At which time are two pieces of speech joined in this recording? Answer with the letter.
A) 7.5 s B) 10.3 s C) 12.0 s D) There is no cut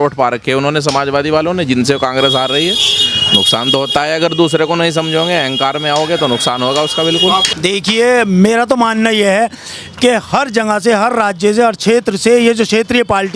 A